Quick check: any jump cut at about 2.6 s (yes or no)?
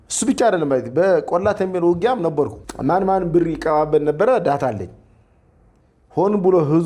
yes